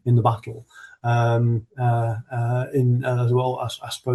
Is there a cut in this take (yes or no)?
no